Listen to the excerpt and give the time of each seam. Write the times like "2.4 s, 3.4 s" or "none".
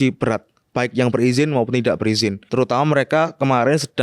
2.5 s